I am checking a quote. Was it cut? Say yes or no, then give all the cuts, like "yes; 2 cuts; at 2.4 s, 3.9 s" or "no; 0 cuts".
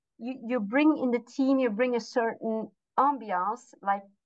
no; 0 cuts